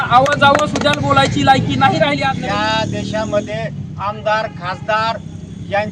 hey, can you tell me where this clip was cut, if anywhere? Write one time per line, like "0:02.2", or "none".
0:02.2

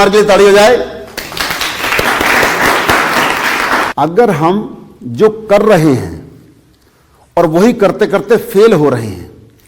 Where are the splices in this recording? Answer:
0:03.9

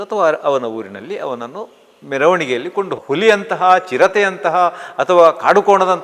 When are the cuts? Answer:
0:03.0

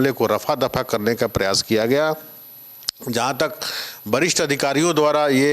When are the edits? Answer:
none

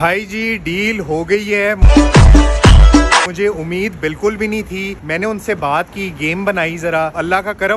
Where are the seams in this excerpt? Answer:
none

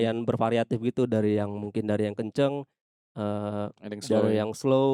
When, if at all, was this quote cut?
none

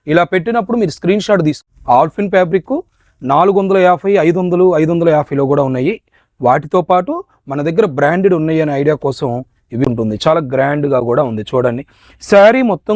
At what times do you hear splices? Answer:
0:01.6
0:09.8

